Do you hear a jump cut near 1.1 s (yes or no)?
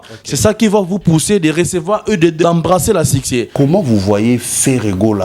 no